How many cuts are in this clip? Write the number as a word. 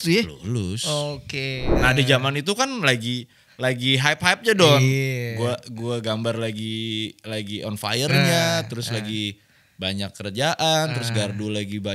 one